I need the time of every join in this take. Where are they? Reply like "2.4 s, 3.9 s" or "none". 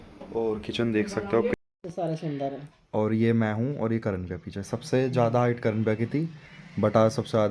1.5 s